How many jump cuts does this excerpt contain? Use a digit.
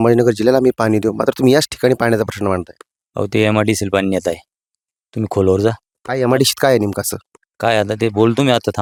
0